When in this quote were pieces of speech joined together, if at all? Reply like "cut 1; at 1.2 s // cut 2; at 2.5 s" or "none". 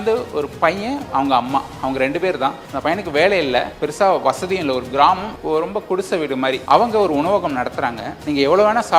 none